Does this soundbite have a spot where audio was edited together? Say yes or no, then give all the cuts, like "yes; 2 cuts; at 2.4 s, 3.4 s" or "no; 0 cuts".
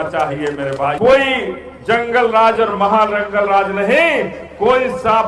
yes; 1 cut; at 1.0 s